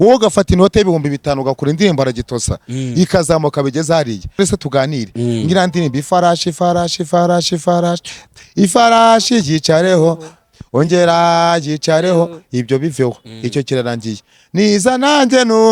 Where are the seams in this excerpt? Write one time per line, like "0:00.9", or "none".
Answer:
0:04.4